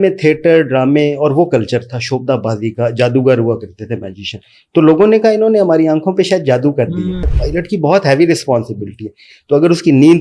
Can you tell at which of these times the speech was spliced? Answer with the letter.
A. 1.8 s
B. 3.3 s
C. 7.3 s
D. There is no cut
C